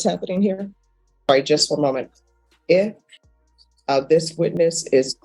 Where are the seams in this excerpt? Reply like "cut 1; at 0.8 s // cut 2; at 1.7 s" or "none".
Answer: cut 1; at 1.3 s